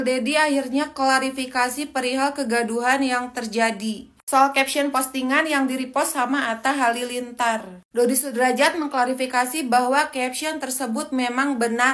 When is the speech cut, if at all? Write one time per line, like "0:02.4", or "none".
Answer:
none